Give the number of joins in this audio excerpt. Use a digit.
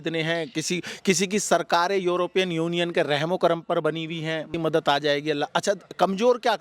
1